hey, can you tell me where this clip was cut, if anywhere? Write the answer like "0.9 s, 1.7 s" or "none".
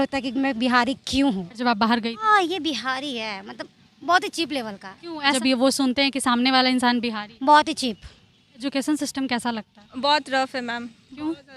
1.6 s, 5.3 s, 8.7 s